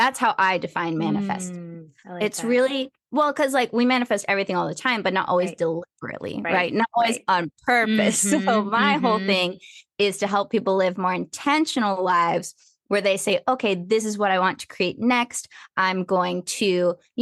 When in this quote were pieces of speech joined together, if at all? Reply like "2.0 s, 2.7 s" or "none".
none